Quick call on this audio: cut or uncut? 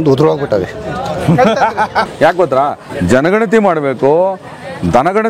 cut